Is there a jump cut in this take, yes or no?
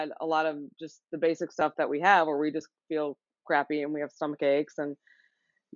no